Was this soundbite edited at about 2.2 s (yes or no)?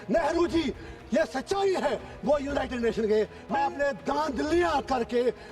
no